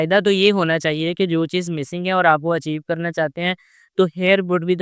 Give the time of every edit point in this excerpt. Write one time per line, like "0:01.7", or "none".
none